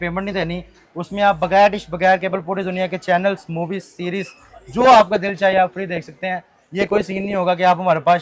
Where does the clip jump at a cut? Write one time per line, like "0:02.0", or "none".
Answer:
none